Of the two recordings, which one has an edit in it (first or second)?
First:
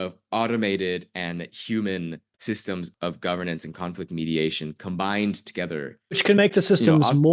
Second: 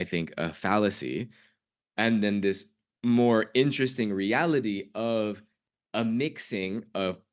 first